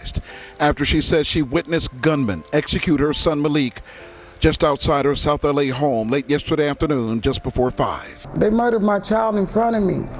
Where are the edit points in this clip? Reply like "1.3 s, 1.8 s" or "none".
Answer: 8.2 s